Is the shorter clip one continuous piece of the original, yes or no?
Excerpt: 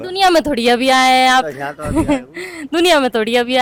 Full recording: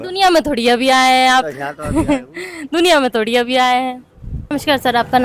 yes